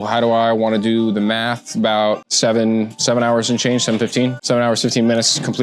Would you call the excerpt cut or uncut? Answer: cut